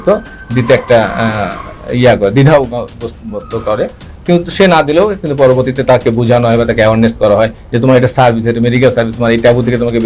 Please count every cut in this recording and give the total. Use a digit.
0